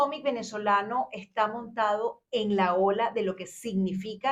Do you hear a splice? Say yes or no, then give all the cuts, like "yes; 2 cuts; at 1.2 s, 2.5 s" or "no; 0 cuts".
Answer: no; 0 cuts